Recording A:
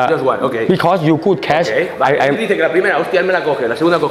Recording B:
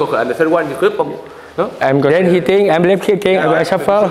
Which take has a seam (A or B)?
B